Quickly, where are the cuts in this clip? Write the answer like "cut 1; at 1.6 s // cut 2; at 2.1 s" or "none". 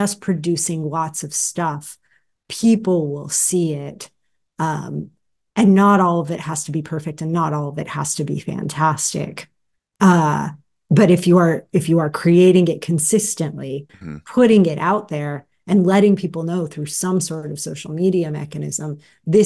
cut 1; at 13.9 s